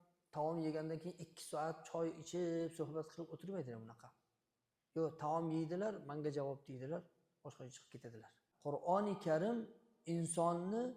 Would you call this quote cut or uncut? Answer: cut